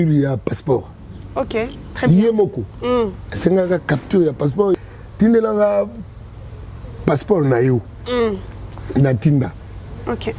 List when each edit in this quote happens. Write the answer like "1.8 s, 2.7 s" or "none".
4.8 s